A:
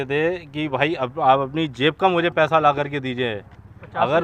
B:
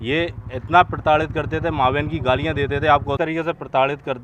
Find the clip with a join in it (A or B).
B